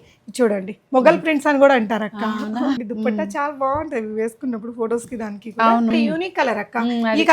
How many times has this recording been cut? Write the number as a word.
two